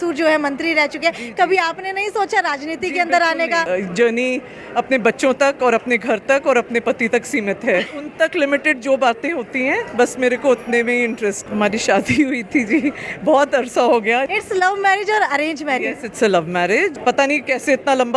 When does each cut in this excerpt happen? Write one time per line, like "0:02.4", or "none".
0:03.7
0:07.9
0:11.4
0:14.3
0:17.0